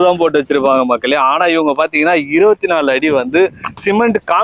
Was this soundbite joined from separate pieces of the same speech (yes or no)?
no